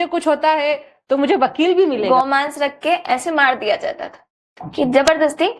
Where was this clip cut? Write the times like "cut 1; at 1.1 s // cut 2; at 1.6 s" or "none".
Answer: cut 1; at 2.1 s